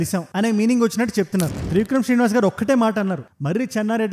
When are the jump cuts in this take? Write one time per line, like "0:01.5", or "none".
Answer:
0:01.5